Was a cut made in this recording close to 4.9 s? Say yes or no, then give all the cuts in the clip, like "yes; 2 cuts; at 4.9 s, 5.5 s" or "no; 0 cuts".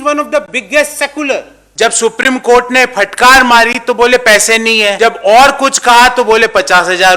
yes; 2 cuts; at 1.6 s, 4.9 s